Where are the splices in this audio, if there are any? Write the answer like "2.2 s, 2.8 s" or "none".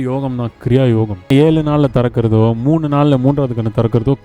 1.3 s